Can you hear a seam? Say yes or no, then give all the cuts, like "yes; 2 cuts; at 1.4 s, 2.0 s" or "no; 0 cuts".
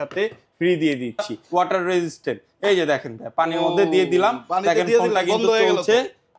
yes; 1 cut; at 1.4 s